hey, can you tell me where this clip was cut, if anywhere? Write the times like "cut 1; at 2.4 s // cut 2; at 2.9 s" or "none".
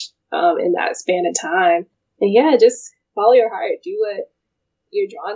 cut 1; at 2.0 s